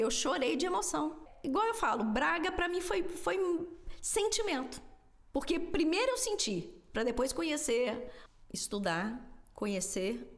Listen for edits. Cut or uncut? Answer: cut